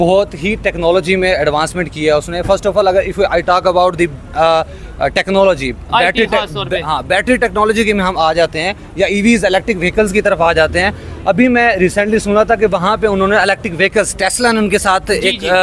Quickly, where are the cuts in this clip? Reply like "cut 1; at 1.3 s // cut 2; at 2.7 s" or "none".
none

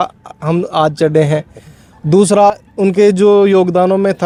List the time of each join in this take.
none

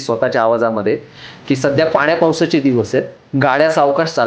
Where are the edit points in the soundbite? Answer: cut 1; at 3.2 s

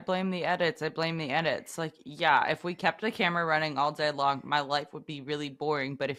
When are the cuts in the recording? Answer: none

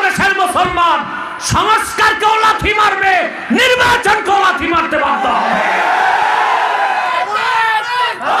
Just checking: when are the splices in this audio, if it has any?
none

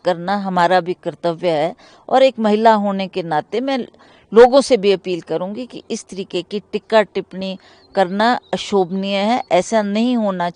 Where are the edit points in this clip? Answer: none

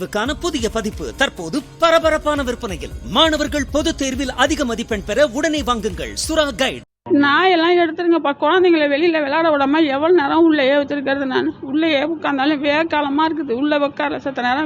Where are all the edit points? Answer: cut 1; at 6.9 s

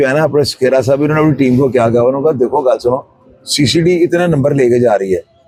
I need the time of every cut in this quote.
none

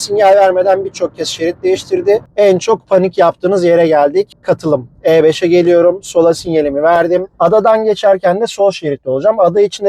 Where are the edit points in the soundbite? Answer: cut 1; at 2.2 s // cut 2; at 7.3 s

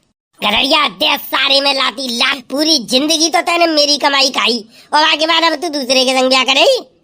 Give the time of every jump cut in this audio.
cut 1; at 2.3 s

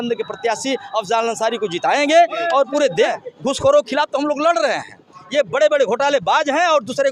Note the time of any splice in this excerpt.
cut 1; at 3.1 s

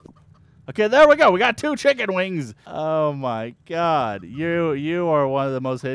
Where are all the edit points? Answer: cut 1; at 2.6 s

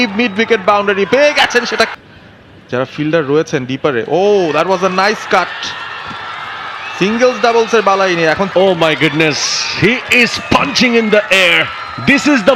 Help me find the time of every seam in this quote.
cut 1; at 2.0 s // cut 2; at 8.5 s

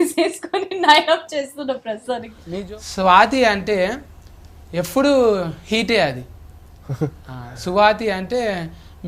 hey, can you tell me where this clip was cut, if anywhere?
cut 1; at 2.3 s

